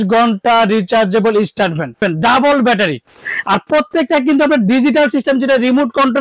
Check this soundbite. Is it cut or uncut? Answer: cut